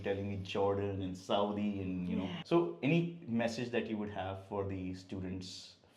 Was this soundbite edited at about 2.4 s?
yes; 1 cut; at 2.4 s

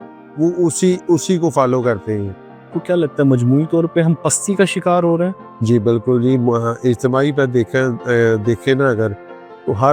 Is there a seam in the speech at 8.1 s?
no; 2 cuts; at 2.7 s, 5.5 s

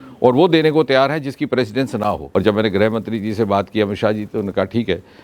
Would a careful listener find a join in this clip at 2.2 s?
yes; 1 cut; at 2.2 s

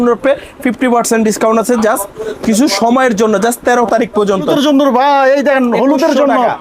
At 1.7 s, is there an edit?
no; 1 cut; at 4.5 s

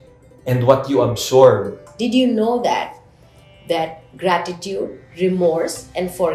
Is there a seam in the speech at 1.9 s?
yes; 1 cut; at 1.9 s

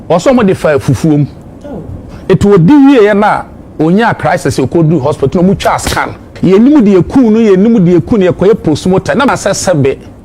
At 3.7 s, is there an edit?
no; 2 cuts; at 6.3 s, 9.3 s

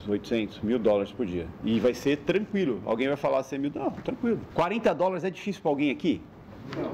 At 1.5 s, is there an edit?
yes; 2 cuts; at 1.5 s, 4.5 s

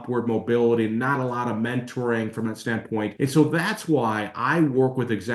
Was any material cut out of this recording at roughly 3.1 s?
yes; 1 cut; at 3.1 s

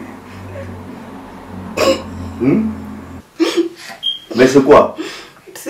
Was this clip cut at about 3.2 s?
yes; 1 cut; at 3.2 s

